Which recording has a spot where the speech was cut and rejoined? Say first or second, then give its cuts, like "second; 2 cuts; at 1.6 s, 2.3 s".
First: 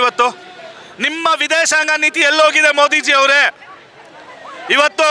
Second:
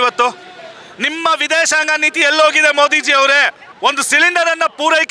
second; 1 cut; at 3.6 s